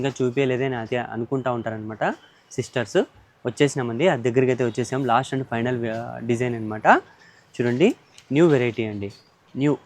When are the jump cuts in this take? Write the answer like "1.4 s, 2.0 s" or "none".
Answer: none